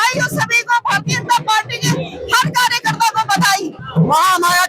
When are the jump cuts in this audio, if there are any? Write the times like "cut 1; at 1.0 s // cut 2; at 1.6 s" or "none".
cut 1; at 3.8 s